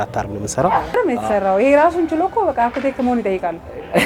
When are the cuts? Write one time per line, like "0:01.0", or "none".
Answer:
0:00.9